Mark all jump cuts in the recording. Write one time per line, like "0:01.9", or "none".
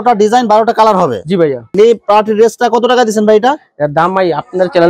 0:01.7